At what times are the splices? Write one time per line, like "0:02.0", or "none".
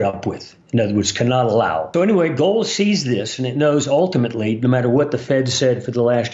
0:01.9